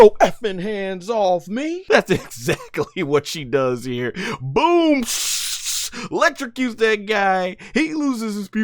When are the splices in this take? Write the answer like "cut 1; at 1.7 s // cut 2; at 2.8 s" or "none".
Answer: cut 1; at 1.8 s